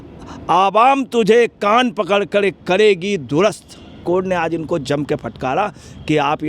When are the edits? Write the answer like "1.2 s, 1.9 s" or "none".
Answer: 4.0 s